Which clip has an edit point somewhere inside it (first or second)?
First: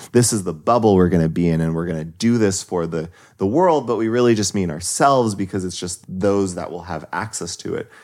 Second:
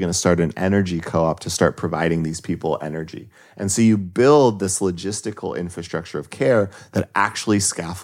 first